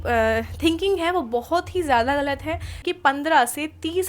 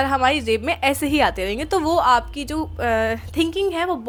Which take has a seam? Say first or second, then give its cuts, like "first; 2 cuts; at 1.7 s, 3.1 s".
first; 1 cut; at 2.8 s